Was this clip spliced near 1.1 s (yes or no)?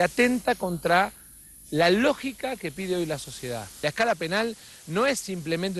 no